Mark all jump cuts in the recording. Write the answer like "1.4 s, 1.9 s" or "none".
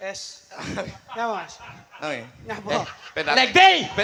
none